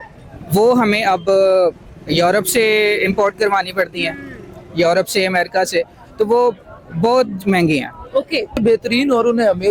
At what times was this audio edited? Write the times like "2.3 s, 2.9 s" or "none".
8.6 s